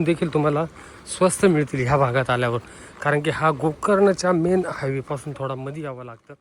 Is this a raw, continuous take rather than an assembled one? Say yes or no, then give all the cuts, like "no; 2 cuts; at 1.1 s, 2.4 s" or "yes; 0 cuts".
yes; 0 cuts